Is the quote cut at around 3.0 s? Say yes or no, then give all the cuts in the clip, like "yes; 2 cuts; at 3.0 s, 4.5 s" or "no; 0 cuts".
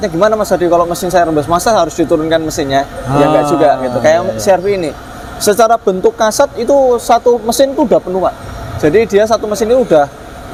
no; 0 cuts